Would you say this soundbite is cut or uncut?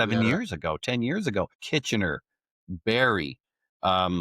cut